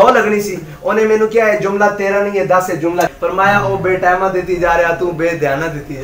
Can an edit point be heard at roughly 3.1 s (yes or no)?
yes